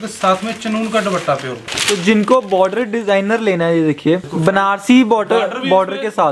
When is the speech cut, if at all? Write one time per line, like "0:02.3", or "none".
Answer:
0:01.7
0:04.3